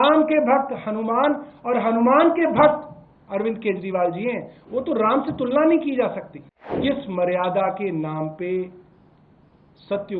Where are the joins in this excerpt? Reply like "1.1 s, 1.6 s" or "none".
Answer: 6.8 s